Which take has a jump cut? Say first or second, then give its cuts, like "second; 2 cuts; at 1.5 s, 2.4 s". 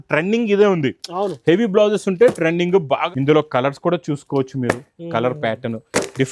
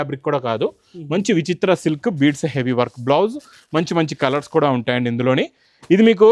first; 1 cut; at 3.0 s